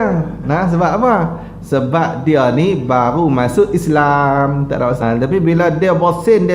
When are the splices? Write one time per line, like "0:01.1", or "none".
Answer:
0:05.0